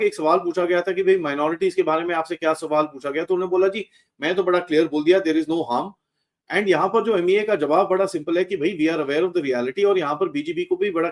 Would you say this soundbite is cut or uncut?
uncut